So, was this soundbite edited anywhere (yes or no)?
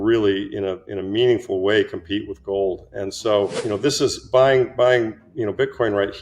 yes